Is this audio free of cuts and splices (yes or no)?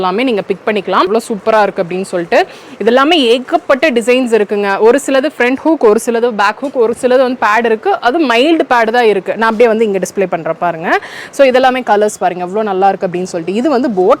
no